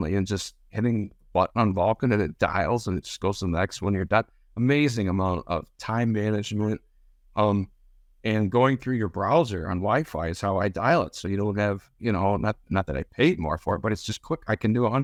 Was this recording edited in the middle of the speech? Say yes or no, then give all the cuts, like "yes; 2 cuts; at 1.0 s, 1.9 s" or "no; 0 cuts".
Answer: no; 0 cuts